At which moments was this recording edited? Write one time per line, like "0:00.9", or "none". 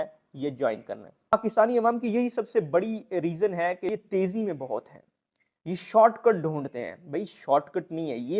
0:01.3
0:03.9